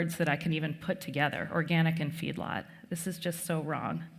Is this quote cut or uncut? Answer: uncut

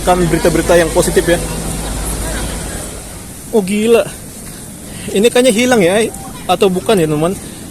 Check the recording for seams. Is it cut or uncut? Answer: cut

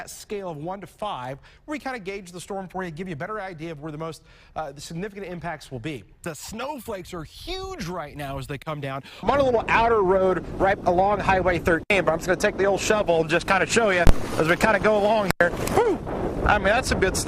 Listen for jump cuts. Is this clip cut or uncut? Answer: cut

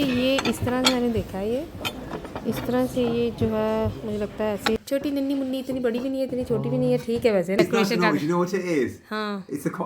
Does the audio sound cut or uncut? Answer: cut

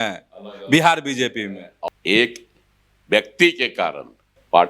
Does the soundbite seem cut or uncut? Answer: cut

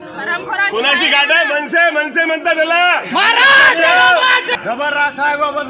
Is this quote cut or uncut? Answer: cut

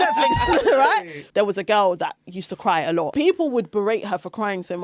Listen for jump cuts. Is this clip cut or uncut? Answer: cut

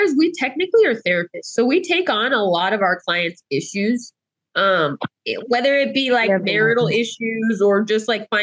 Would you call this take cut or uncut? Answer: uncut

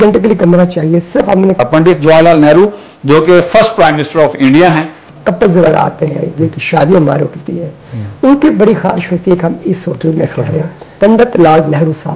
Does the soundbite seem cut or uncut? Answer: cut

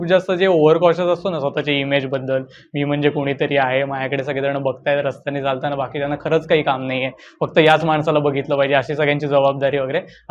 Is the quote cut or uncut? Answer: uncut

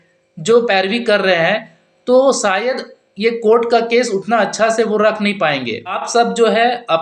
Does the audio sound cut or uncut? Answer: cut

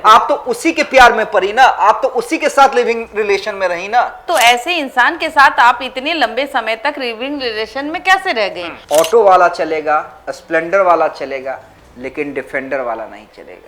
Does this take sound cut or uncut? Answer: cut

